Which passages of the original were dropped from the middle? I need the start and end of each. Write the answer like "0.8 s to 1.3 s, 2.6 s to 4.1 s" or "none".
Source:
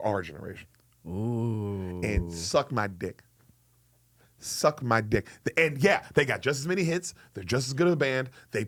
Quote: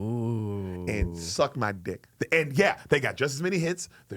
3.2 s to 5.3 s